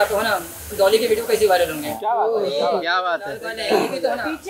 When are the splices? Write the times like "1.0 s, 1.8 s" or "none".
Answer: none